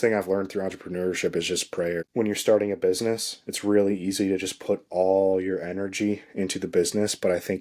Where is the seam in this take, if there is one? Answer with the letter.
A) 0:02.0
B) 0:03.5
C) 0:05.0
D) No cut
A